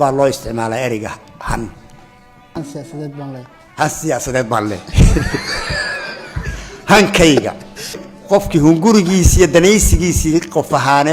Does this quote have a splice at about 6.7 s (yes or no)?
no